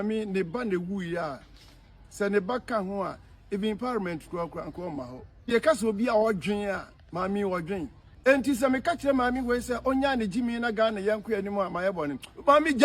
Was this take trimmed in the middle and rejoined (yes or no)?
yes